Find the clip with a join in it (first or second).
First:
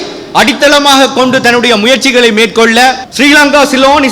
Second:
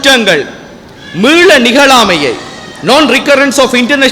first